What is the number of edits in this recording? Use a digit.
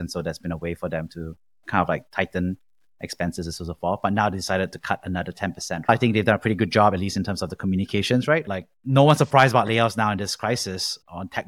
2